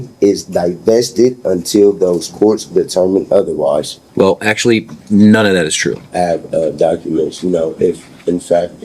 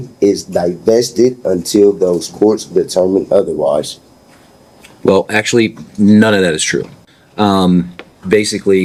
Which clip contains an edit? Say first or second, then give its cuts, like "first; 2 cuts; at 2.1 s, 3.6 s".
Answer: first; 2 cuts; at 4.0 s, 6.0 s